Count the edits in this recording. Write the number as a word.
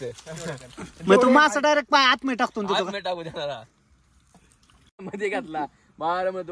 one